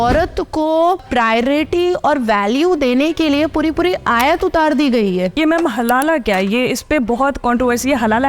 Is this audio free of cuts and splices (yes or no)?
no